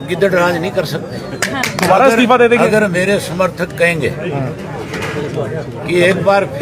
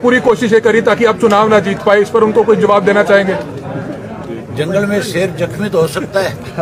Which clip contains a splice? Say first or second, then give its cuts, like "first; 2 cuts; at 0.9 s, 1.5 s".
first; 1 cut; at 1.8 s